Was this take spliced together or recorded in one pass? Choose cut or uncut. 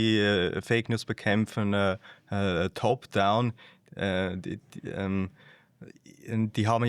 uncut